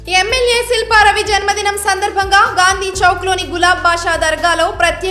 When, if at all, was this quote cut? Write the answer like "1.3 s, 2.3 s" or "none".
none